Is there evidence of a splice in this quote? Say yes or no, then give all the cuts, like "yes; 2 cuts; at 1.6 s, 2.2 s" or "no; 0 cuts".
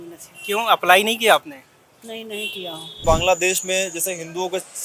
yes; 1 cut; at 3.0 s